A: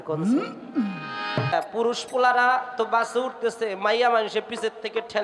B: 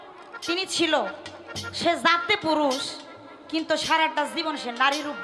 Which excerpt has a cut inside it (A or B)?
A